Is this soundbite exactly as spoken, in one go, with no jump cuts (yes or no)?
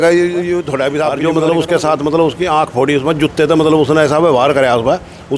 no